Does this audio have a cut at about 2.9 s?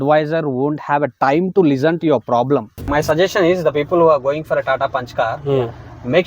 yes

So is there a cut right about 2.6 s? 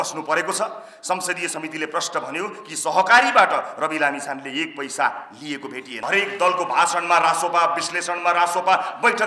no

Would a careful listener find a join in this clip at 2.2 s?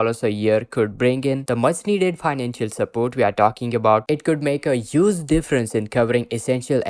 no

